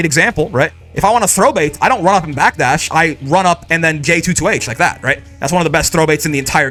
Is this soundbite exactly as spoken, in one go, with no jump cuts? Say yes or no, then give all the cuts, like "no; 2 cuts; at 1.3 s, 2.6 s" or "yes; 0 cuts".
yes; 0 cuts